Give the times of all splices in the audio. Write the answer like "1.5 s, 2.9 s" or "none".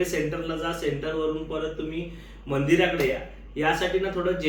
none